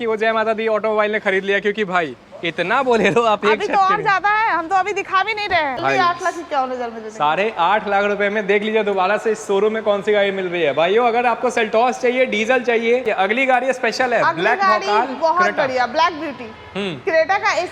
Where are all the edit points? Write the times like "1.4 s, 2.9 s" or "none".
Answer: 5.8 s, 13.0 s